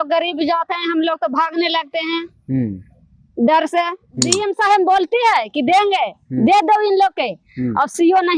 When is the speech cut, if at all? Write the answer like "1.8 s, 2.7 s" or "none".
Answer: 4.3 s